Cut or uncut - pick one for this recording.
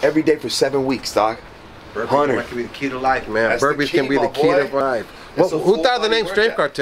cut